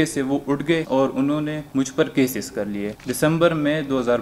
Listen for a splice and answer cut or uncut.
cut